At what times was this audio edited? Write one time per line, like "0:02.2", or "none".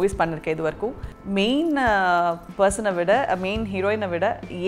0:01.1